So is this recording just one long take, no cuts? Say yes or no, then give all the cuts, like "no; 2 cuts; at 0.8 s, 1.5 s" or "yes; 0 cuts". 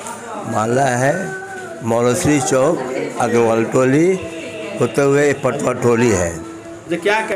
yes; 0 cuts